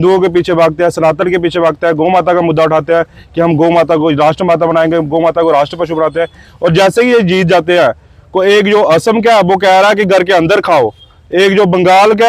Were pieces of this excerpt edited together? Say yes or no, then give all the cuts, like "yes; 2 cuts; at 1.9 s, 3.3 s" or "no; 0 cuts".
no; 0 cuts